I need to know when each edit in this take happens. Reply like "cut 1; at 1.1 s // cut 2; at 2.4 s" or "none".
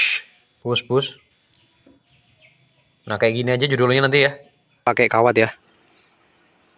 cut 1; at 4.8 s